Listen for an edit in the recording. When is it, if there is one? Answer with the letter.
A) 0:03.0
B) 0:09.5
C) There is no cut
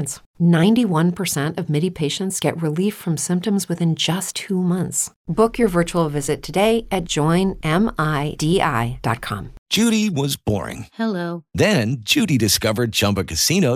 B